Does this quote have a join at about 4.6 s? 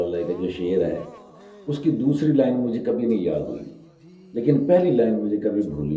no; 0 cuts

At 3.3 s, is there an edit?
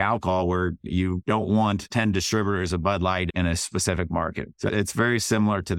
yes; 4 cuts; at 0.8 s, 1.8 s, 3.3 s, 4.5 s

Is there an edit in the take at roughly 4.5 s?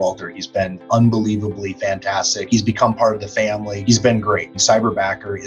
yes; 3 cuts; at 2.4 s, 3.7 s, 4.5 s

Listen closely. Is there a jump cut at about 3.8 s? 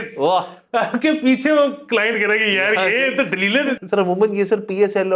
yes; 1 cut; at 3.8 s

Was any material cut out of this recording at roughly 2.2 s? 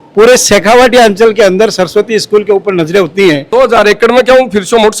no; 1 cut; at 3.4 s

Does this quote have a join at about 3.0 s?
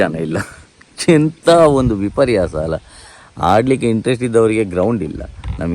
yes; 1 cut; at 3.0 s

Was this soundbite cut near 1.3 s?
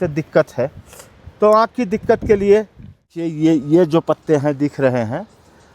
no; 1 cut; at 3.2 s

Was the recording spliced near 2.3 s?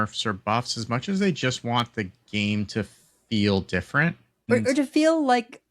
no; 1 cut; at 4.5 s

